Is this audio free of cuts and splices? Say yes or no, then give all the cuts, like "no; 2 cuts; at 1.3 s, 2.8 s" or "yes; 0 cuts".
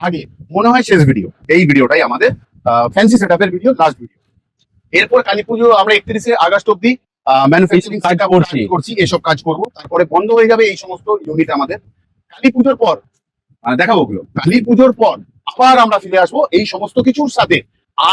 yes; 0 cuts